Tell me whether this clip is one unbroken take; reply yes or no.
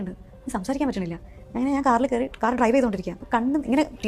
yes